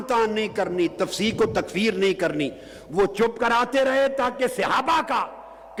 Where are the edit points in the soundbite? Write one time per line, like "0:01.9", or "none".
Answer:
none